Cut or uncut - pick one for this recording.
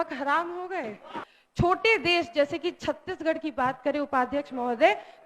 cut